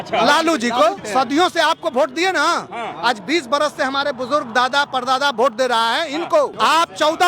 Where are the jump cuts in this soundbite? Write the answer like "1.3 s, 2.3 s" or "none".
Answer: 1.0 s, 6.5 s